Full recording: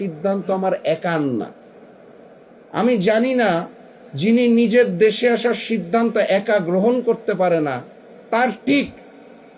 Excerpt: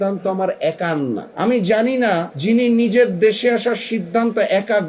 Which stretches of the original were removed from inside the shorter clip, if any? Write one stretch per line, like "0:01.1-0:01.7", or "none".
0:01.5-0:02.6
0:03.7-0:04.1